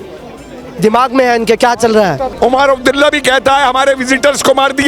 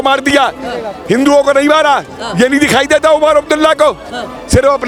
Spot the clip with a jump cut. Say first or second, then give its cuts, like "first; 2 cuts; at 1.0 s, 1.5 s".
first; 1 cut; at 2.3 s